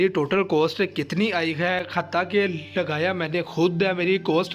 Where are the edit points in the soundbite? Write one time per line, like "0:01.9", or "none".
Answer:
none